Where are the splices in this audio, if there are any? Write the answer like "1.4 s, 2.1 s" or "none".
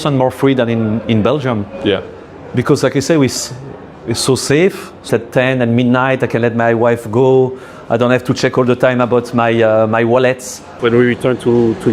5.1 s, 10.6 s